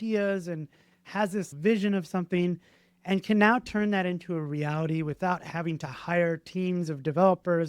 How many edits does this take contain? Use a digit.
1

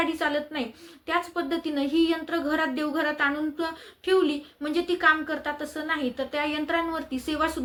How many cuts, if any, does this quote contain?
0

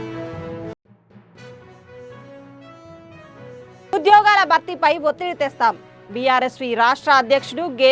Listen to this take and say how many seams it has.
1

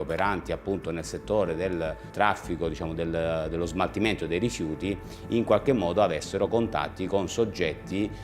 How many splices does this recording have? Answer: 1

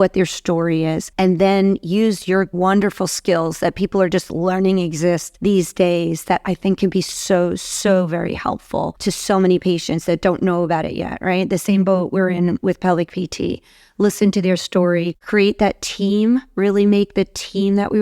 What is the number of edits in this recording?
5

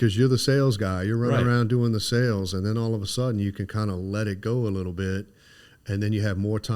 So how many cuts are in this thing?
0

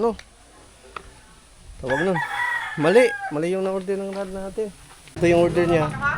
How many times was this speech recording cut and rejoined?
1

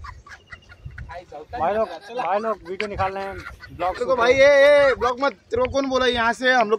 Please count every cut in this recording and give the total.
0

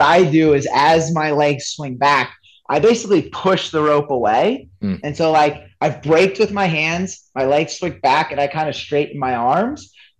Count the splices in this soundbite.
0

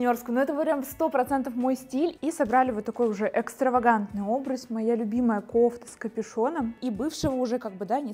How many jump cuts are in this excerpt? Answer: 2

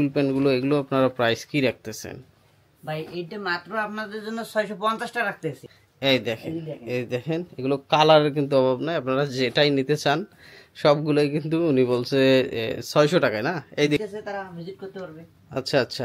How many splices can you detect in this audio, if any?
2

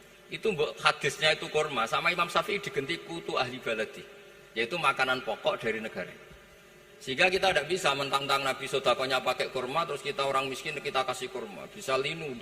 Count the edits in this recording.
1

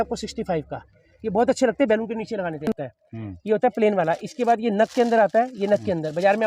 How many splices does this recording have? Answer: 1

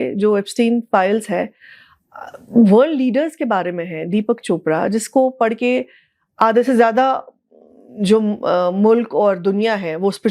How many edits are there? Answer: 0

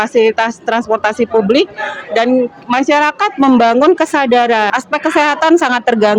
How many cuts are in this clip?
1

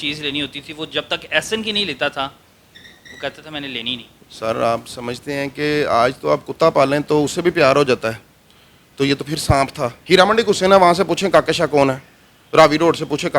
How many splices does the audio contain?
1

